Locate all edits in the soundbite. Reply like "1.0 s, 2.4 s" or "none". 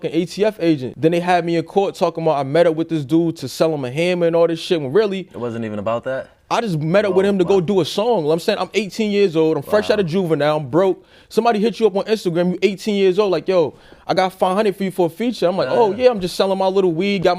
none